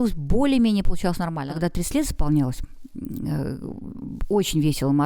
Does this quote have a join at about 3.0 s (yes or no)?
no